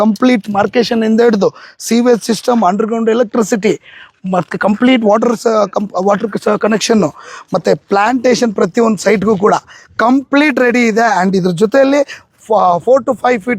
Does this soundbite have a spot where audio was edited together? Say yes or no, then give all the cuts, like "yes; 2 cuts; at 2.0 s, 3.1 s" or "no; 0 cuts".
no; 0 cuts